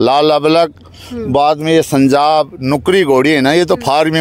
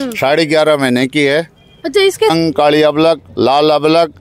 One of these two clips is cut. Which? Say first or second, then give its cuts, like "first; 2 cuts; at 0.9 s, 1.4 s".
second; 1 cut; at 2.3 s